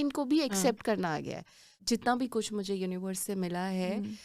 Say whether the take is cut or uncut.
cut